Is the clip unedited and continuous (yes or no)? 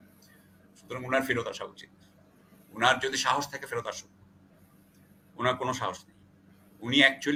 yes